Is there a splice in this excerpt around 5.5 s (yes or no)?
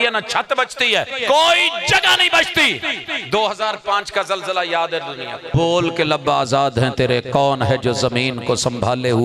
yes